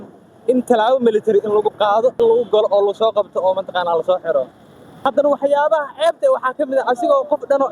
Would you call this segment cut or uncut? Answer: cut